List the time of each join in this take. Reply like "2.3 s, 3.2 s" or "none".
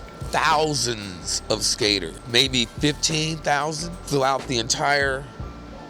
2.2 s, 4.0 s